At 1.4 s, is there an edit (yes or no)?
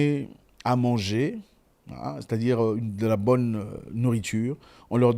no